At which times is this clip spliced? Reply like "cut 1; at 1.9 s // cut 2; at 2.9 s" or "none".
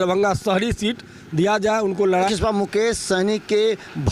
cut 1; at 2.3 s